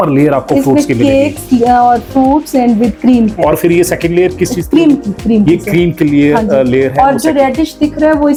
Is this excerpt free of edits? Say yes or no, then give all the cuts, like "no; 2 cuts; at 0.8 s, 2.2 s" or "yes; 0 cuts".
yes; 0 cuts